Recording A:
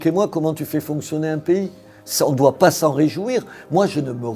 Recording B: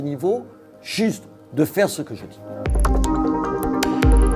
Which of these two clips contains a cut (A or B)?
B